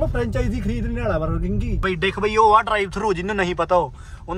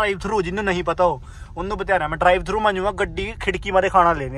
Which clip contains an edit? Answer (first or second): first